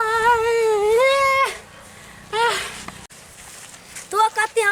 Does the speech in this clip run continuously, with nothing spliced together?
yes; 0 cuts

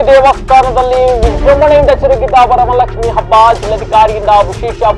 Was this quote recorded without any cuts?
yes; 0 cuts

